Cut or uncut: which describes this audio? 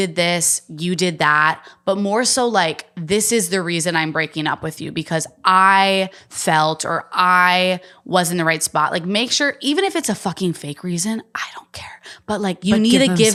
uncut